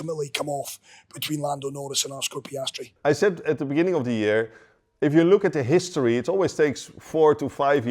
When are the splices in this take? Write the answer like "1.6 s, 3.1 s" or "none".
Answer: 2.9 s